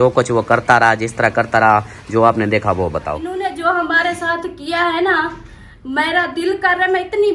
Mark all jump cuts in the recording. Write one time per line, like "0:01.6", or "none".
0:03.3